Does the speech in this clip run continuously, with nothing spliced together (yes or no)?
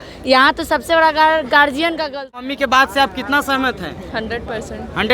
no